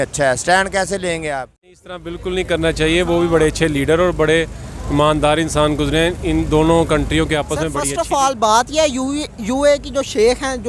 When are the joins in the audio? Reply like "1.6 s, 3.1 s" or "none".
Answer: 1.8 s, 7.8 s